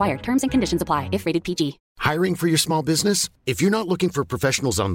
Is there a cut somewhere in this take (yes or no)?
yes